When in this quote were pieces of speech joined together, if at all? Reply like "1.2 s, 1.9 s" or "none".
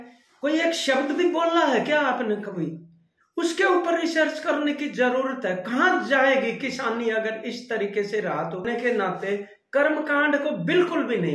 8.7 s